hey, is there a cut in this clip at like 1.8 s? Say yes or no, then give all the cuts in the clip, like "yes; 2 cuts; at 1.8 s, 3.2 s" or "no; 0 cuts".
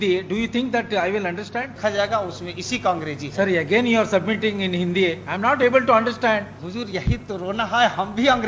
yes; 2 cuts; at 1.8 s, 6.6 s